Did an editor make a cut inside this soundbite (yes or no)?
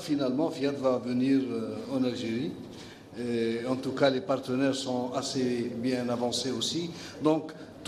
no